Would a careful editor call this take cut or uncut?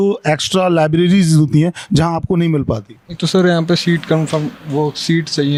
uncut